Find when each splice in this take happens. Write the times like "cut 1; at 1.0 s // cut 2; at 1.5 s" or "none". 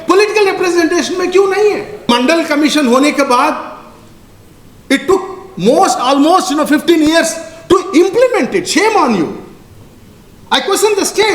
cut 1; at 2.1 s